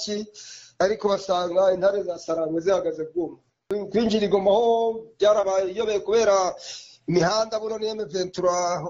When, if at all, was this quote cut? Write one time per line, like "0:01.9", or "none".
0:03.7